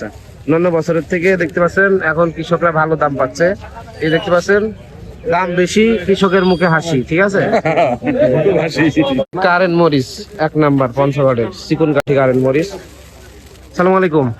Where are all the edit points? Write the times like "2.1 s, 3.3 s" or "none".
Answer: 9.2 s